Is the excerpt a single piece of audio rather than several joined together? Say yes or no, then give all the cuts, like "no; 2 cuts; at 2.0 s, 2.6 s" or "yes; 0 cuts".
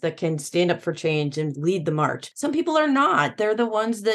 no; 1 cut; at 2.3 s